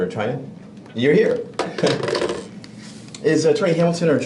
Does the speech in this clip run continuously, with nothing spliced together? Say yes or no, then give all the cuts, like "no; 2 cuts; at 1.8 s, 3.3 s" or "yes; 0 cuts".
yes; 0 cuts